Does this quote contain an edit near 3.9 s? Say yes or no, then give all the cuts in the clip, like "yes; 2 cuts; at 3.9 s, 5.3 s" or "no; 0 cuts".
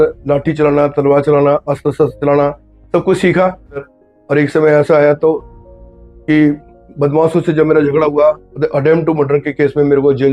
yes; 1 cut; at 3.9 s